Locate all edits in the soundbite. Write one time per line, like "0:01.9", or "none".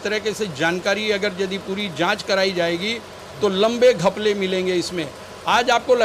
none